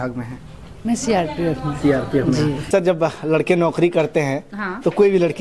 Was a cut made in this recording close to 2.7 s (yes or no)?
yes